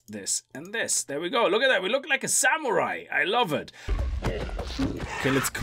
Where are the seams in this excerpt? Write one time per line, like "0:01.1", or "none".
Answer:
0:03.9